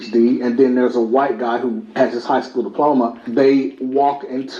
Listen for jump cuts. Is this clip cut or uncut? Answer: cut